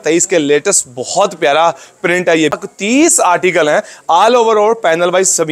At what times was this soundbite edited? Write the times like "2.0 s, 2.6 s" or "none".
2.6 s